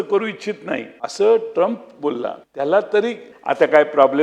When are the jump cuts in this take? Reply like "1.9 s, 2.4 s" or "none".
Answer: 1.0 s, 2.4 s, 3.3 s